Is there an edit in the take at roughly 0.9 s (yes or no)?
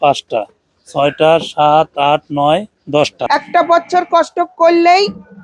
no